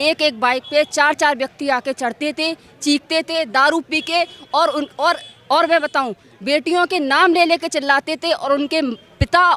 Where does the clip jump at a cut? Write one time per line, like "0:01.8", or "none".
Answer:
none